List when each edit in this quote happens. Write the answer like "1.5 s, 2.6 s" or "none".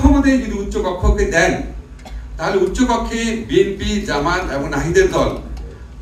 none